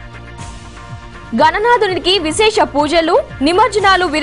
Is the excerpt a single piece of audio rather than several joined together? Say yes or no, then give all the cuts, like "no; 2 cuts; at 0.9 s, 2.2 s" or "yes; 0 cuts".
no; 1 cut; at 1.3 s